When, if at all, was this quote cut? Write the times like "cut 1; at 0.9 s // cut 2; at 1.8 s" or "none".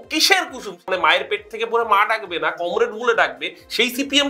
cut 1; at 0.9 s

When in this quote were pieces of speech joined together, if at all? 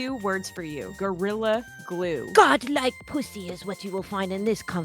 cut 1; at 0.9 s // cut 2; at 2.3 s

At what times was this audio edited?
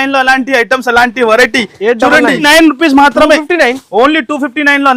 cut 1; at 2.5 s

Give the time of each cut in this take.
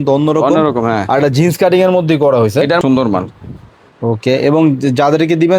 cut 1; at 2.8 s

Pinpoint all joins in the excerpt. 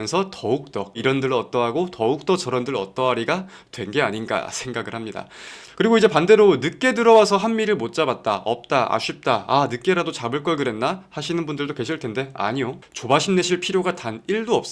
cut 1; at 5.6 s

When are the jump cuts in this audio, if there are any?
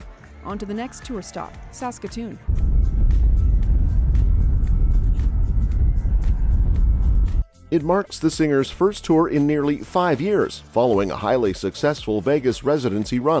none

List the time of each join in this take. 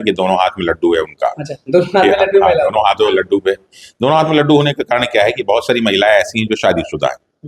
none

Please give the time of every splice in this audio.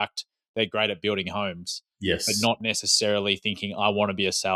none

